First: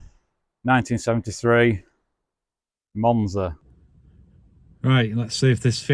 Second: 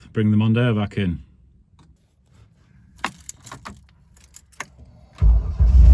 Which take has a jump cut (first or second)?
first